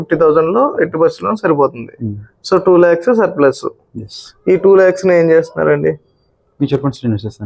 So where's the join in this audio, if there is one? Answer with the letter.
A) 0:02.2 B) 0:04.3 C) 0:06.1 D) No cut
D